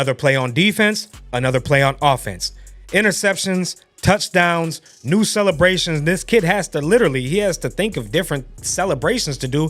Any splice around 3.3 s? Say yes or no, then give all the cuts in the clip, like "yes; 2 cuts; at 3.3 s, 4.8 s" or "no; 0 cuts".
no; 0 cuts